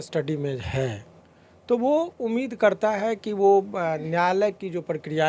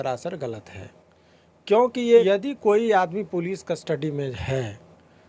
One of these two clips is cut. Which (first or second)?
second